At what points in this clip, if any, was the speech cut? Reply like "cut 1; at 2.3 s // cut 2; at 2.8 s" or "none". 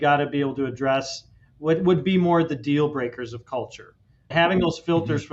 cut 1; at 4.3 s